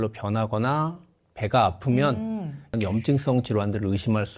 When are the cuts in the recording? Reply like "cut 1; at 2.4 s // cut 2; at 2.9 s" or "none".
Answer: cut 1; at 2.7 s